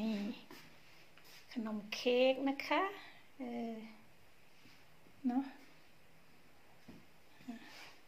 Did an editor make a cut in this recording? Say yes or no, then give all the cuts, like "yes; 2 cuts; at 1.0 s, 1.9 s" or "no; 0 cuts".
no; 0 cuts